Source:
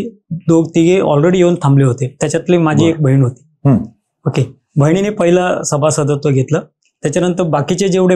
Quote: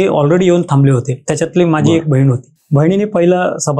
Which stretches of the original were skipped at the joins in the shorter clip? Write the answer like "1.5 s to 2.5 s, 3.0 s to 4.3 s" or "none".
3.5 s to 4.6 s